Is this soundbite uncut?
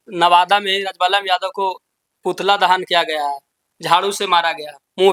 yes; 0 cuts

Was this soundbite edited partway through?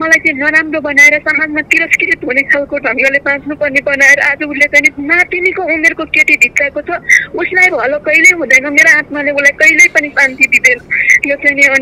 no; 0 cuts

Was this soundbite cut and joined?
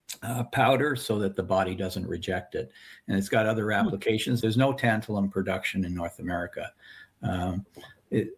yes; 1 cut; at 4.4 s

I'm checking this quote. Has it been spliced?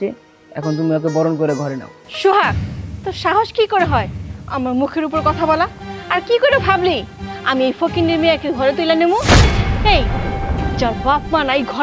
no; 0 cuts

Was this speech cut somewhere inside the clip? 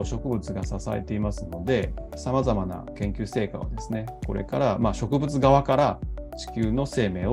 yes; 2 cuts; at 2.0 s, 2.9 s

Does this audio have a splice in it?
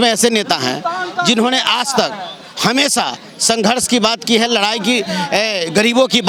no; 0 cuts

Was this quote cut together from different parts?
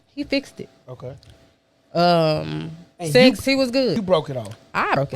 yes; 1 cut; at 2.0 s

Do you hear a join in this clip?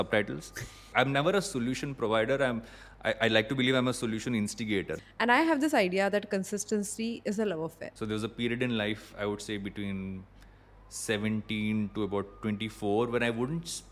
yes; 3 cuts; at 0.8 s, 4.9 s, 7.9 s

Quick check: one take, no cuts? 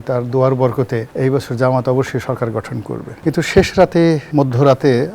no; 3 cuts; at 1.0 s, 3.0 s, 4.2 s

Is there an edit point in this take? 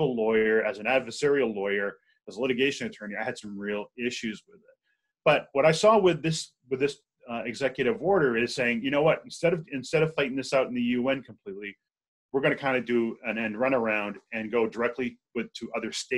no; 0 cuts

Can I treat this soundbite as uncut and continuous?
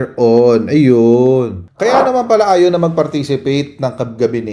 yes; 0 cuts

